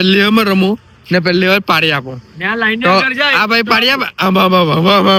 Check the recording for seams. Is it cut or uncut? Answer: uncut